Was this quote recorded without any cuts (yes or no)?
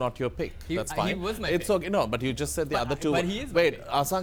yes